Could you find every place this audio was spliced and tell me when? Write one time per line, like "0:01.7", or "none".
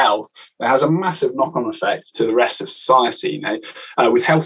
0:02.1